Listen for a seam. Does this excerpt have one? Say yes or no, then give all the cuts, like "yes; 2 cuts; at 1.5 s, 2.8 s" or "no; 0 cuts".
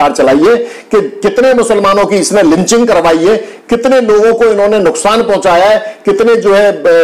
no; 0 cuts